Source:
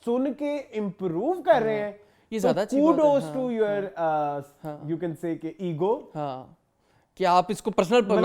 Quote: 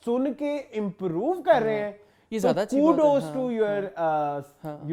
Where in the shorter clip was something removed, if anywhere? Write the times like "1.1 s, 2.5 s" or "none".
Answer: none